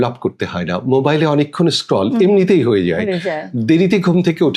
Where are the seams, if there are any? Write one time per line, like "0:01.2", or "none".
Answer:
none